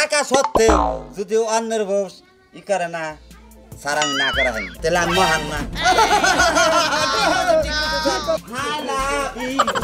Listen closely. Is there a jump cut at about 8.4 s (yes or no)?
yes